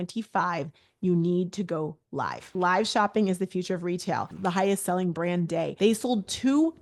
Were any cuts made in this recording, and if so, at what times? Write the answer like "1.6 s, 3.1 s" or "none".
2.4 s, 4.3 s, 5.7 s

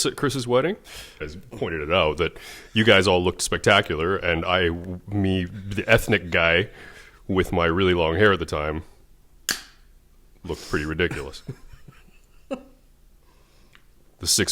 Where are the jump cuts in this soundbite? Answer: 1.2 s

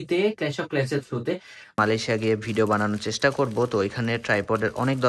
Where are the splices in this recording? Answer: 1.8 s

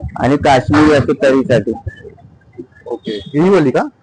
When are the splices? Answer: none

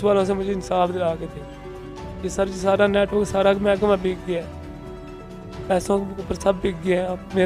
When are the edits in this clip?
none

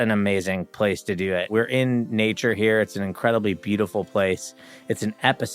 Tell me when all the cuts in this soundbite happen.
1.5 s

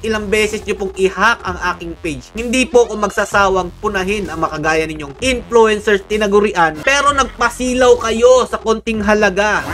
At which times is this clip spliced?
5.1 s, 6.8 s

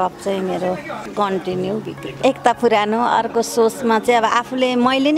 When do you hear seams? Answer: 1.0 s, 2.3 s

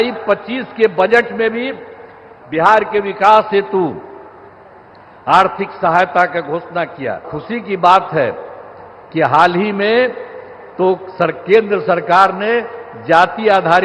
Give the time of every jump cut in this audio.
7.3 s

